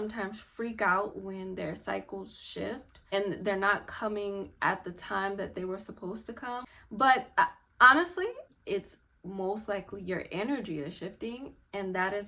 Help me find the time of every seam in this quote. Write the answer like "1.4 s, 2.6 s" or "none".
3.0 s, 6.6 s, 8.4 s